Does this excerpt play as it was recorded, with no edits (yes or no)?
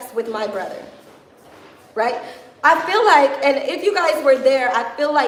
yes